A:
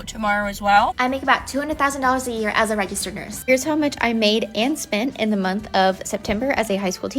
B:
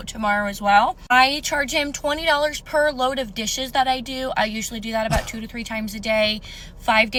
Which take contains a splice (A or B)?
A